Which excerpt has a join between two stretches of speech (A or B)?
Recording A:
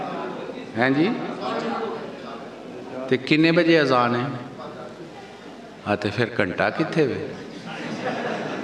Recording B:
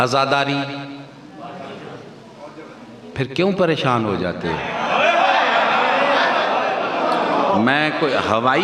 B